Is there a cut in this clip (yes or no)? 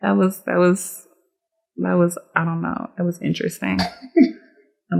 no